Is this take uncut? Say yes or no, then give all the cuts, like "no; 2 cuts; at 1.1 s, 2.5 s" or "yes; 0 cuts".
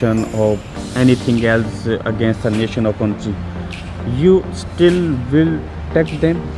yes; 0 cuts